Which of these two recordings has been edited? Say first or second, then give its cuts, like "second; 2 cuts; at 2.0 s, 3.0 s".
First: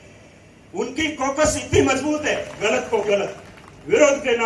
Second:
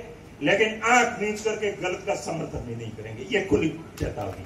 first; 1 cut; at 2.5 s